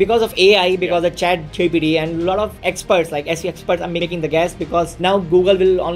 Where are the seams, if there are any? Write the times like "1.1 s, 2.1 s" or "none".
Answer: 2.6 s, 4.0 s, 4.9 s